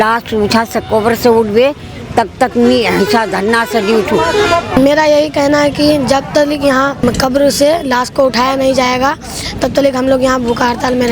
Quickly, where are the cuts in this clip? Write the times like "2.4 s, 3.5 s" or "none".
4.8 s, 7.0 s